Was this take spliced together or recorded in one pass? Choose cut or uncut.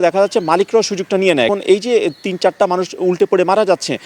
cut